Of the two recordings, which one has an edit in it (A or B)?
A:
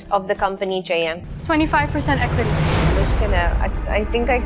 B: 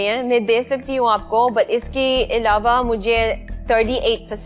A